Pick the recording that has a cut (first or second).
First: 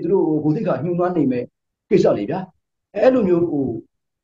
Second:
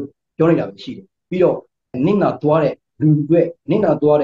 second